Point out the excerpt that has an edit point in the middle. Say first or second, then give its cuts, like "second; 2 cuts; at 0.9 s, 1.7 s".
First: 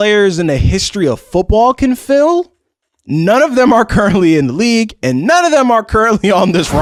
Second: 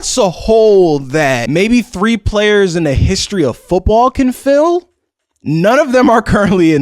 second; 1 cut; at 1.4 s